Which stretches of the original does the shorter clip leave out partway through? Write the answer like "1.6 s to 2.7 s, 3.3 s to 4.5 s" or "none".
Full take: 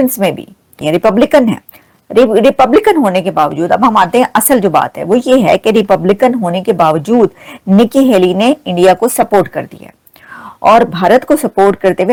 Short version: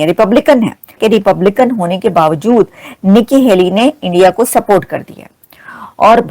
1.8 s to 5.6 s